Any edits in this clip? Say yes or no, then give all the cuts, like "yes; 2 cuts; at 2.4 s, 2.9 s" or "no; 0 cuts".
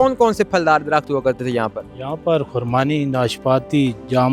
no; 0 cuts